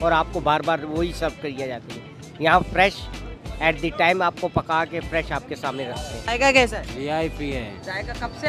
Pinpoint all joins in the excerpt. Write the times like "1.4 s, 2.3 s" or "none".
6.2 s